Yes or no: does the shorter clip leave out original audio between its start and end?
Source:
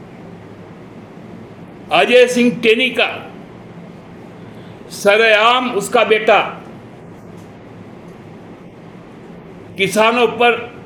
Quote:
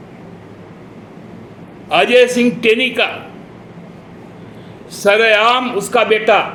no